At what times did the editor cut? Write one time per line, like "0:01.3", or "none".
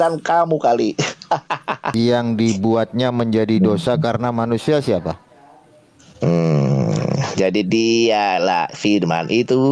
0:01.8